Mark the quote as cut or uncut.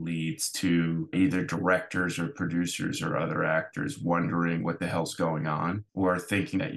cut